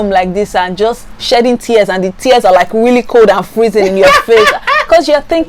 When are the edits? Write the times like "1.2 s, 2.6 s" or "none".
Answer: none